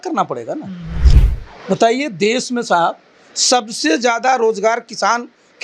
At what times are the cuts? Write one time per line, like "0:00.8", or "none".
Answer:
0:01.1